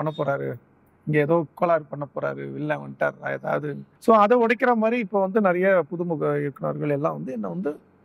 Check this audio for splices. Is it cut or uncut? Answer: cut